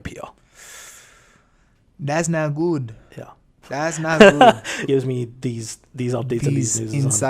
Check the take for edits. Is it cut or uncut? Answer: cut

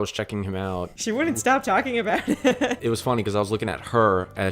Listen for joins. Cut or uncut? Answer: cut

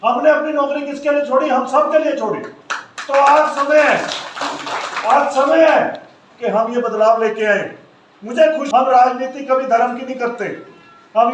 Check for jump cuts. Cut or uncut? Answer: cut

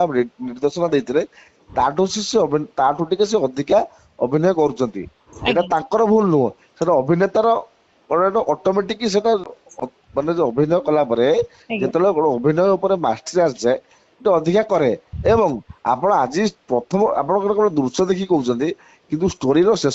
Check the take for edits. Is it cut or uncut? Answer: uncut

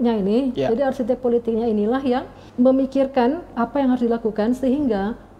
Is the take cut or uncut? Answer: cut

